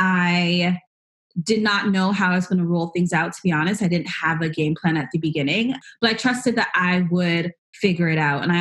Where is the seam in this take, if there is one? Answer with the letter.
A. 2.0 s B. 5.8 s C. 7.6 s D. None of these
B